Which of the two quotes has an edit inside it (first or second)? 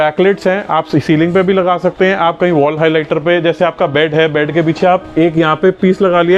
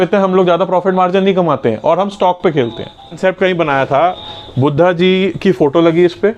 second